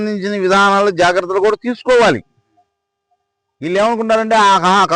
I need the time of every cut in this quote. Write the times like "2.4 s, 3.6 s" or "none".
none